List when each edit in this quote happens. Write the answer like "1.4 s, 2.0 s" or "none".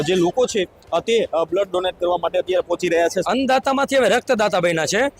3.2 s